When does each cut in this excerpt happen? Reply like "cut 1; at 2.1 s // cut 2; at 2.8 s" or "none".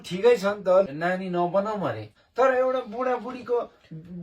cut 1; at 0.9 s // cut 2; at 2.2 s